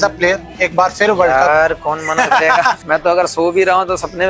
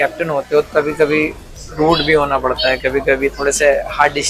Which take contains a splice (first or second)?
first